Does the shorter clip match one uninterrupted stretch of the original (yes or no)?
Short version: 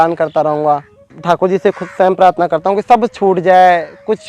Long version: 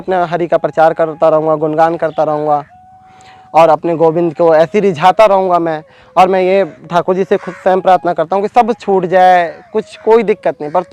no